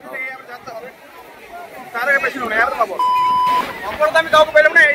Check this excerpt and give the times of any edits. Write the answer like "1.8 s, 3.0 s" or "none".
3.5 s